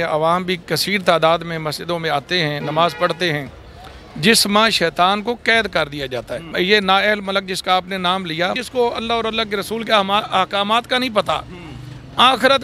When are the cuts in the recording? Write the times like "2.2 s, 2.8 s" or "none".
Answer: 6.4 s, 8.6 s